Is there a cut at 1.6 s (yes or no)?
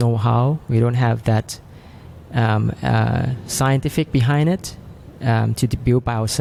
no